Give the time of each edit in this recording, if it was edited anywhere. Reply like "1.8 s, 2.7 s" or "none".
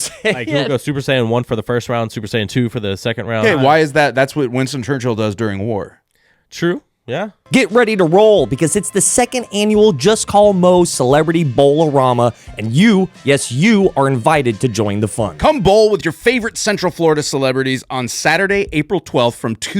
3.4 s, 7.3 s